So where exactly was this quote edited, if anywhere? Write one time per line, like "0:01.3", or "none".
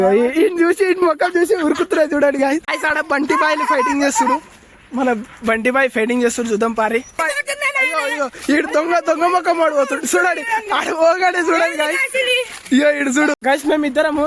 0:02.7
0:07.1
0:13.4